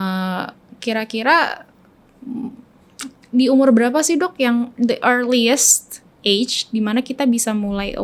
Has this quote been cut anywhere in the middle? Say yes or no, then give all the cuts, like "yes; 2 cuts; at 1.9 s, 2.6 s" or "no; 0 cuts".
no; 0 cuts